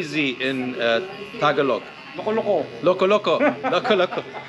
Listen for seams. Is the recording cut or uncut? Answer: cut